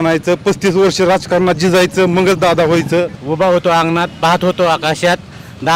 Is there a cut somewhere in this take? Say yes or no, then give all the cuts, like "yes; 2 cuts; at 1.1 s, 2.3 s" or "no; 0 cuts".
yes; 1 cut; at 3.2 s